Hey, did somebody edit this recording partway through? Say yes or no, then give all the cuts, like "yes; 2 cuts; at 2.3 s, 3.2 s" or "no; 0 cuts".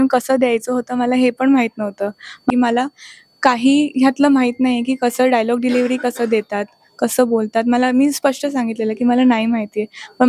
yes; 1 cut; at 2.5 s